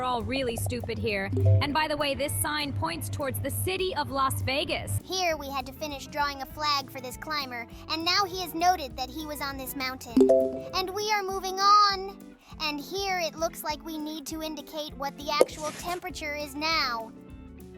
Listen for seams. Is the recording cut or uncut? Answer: cut